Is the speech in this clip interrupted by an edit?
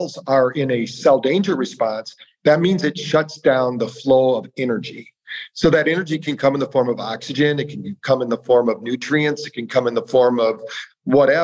yes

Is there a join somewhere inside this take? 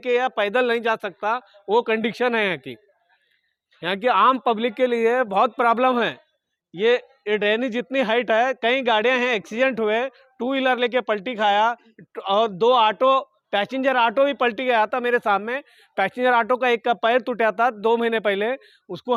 no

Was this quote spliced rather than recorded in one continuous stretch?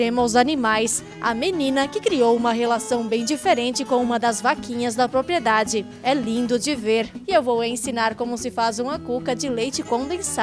yes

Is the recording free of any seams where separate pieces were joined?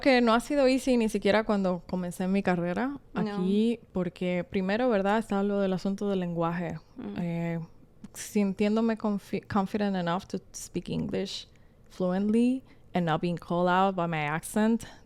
yes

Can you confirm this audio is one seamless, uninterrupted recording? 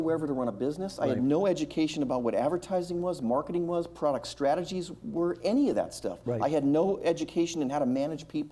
yes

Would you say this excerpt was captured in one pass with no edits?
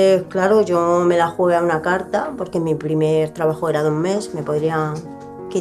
yes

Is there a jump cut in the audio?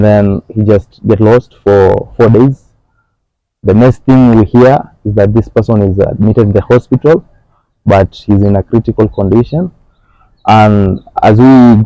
no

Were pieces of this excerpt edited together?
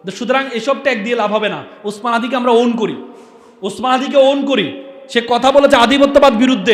no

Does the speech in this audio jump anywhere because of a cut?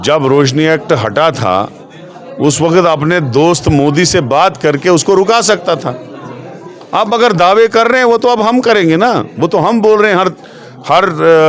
no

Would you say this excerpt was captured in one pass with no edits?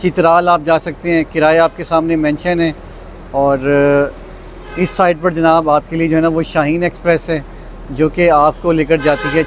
yes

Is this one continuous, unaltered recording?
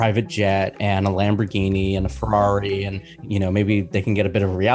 no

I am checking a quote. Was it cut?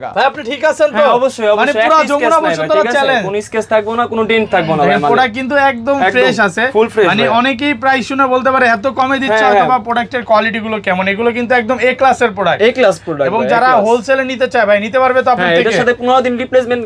no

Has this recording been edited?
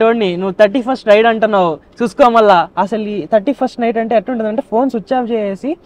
yes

